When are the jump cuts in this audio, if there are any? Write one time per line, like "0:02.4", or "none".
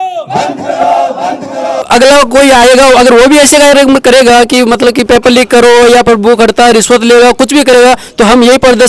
0:01.8